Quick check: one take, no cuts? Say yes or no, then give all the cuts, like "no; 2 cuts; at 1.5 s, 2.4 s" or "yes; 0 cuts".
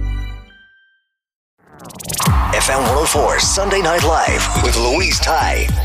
no; 1 cut; at 1.8 s